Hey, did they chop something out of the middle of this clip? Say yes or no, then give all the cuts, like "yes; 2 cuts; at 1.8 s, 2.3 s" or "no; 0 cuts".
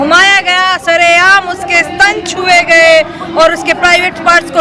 no; 0 cuts